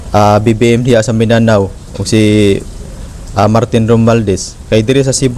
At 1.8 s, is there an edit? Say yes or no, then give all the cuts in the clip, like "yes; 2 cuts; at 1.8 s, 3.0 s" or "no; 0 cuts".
no; 0 cuts